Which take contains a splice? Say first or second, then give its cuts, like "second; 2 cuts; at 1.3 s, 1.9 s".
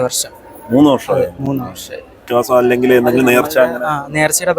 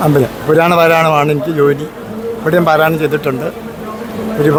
first; 1 cut; at 2.2 s